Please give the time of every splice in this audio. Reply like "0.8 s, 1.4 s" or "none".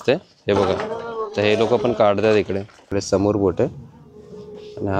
2.8 s